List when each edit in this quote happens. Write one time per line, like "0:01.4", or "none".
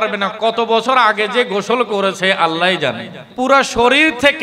0:03.2